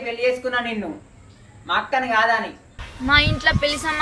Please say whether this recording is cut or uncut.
cut